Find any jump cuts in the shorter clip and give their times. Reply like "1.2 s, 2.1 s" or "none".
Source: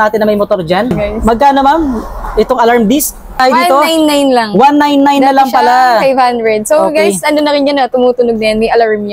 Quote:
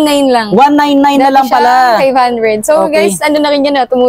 none